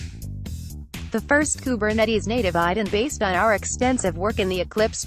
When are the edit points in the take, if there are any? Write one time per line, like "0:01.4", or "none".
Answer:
0:01.1